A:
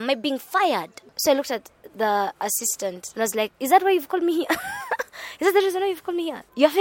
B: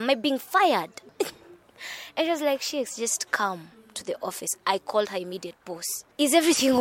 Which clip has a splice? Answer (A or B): A